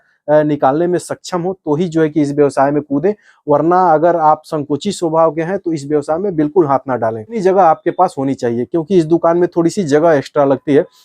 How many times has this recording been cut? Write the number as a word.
one